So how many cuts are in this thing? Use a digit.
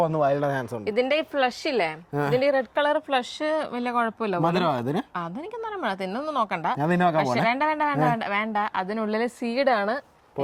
0